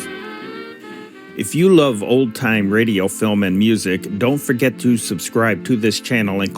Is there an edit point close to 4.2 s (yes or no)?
no